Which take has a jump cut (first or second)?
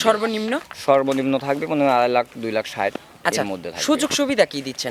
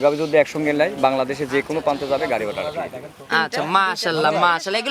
second